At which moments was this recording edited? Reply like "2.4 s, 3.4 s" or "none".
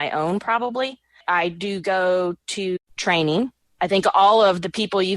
1.2 s, 2.8 s, 3.6 s